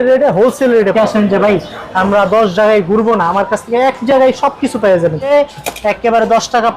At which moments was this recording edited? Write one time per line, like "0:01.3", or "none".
0:00.9
0:05.3